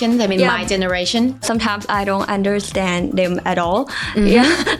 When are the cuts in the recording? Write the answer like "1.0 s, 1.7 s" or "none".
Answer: 1.4 s